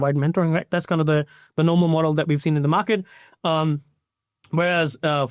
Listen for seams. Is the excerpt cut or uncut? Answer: uncut